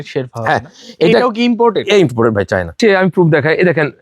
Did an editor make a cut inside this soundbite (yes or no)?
yes